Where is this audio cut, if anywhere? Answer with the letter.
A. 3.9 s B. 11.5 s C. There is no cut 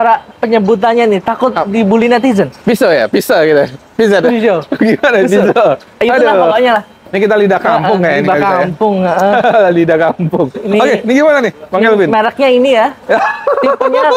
C